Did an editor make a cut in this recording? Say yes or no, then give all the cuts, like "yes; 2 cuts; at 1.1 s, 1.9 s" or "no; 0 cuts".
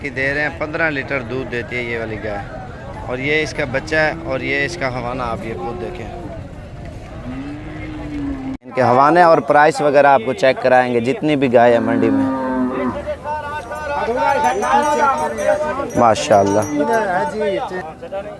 yes; 1 cut; at 8.7 s